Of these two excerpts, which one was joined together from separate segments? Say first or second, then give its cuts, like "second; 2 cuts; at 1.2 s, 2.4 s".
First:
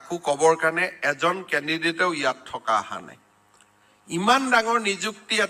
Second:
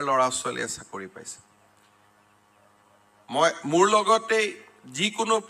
second; 1 cut; at 1.7 s